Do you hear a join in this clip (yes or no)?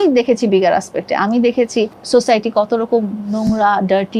yes